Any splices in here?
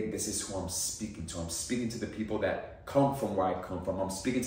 no; 0 cuts

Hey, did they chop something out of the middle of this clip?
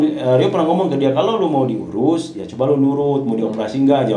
no; 0 cuts

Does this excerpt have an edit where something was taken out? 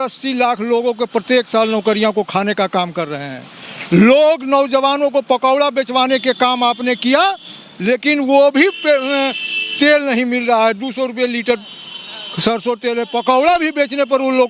no; 0 cuts

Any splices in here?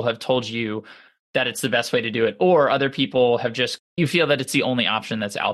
yes; 1 cut; at 3.8 s

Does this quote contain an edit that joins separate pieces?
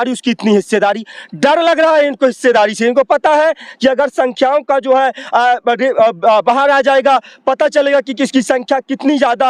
no; 0 cuts

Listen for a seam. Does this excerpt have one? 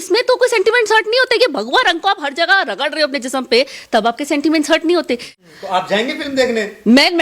yes; 1 cut; at 5.3 s

